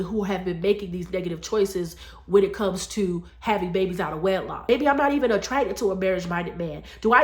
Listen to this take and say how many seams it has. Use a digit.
1